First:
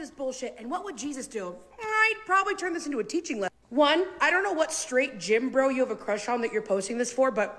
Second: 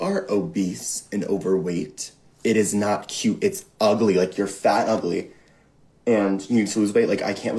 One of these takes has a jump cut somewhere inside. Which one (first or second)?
first